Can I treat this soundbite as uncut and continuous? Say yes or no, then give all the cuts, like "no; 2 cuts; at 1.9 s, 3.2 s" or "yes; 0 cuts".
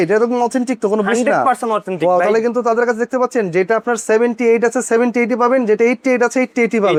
yes; 0 cuts